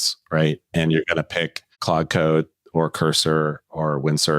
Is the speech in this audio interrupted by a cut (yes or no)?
yes